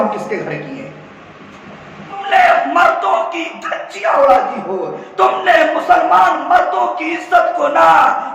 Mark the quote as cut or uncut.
cut